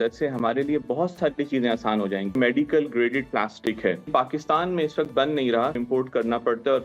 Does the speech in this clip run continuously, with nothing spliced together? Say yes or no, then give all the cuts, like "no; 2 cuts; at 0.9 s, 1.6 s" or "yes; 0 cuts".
no; 3 cuts; at 2.4 s, 4.1 s, 5.8 s